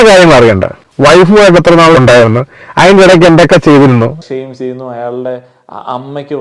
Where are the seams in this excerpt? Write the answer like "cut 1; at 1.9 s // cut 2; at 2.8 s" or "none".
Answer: cut 1; at 4.2 s